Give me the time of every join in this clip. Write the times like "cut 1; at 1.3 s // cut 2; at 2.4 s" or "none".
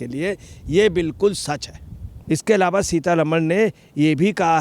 cut 1; at 2.2 s